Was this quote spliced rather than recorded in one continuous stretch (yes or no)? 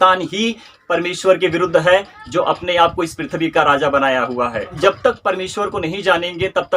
yes